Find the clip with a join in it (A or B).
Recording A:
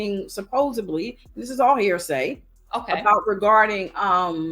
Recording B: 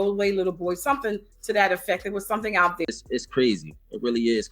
B